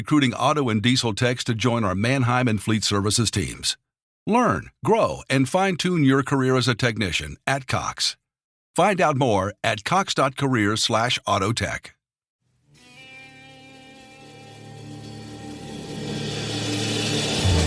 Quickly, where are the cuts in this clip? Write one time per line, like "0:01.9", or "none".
0:12.3